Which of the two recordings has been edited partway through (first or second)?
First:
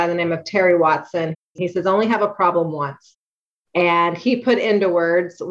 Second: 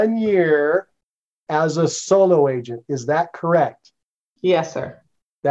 first